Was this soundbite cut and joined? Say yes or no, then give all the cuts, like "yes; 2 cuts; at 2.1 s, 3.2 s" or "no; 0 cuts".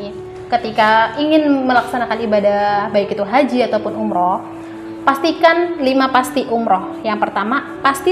no; 0 cuts